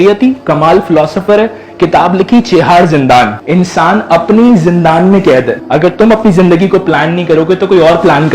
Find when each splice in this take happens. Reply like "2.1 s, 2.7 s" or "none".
3.4 s, 5.5 s

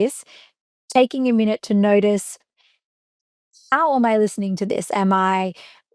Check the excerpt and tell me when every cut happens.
none

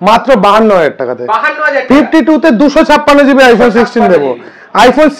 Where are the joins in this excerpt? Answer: none

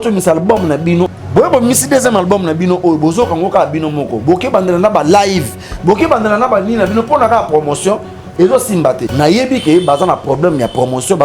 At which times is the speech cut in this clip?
1.1 s, 9.1 s

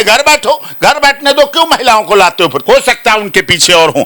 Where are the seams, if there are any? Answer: 2.6 s

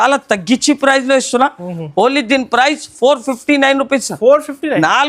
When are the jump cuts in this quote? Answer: none

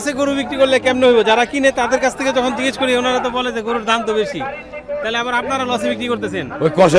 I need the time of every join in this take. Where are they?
none

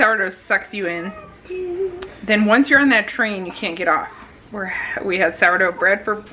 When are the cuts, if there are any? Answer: none

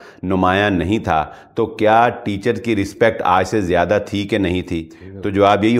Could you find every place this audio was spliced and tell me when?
none

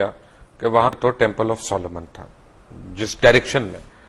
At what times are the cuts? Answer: 0.9 s

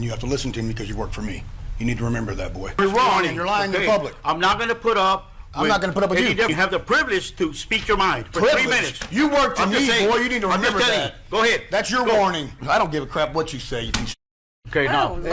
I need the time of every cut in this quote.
2.8 s, 6.5 s, 12.6 s

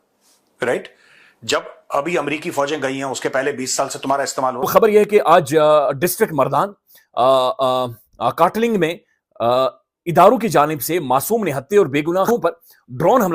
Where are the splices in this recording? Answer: 4.6 s, 12.3 s

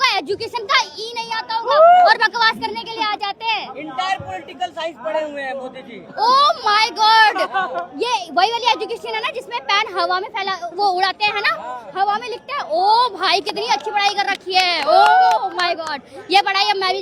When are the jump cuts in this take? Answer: none

